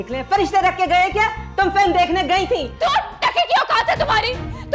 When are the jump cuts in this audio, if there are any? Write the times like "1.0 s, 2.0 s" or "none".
2.7 s